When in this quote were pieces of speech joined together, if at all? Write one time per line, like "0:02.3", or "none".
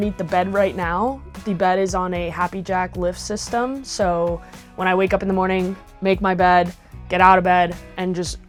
none